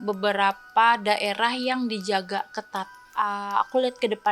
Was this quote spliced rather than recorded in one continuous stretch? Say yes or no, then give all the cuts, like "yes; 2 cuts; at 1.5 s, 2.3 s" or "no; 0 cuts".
yes; 1 cut; at 3.0 s